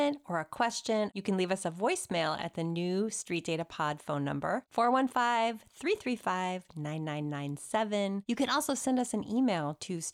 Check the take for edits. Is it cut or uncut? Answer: cut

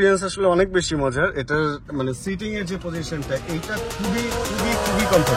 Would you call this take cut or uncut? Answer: uncut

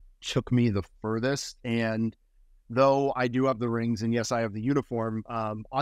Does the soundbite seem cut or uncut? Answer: uncut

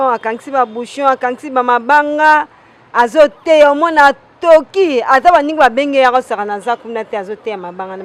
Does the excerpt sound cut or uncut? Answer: uncut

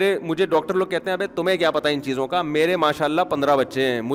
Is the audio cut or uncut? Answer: uncut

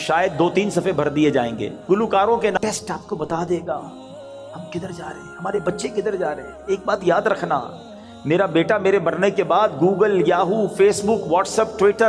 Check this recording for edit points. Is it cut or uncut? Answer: cut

